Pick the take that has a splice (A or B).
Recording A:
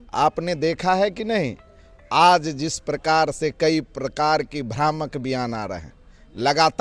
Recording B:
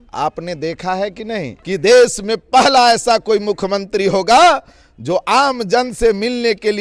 B